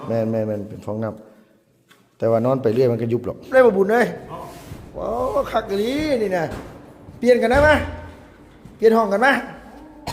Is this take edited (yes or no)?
yes